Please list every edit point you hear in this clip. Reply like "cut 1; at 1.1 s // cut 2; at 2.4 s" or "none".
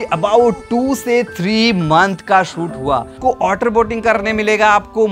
cut 1; at 3.1 s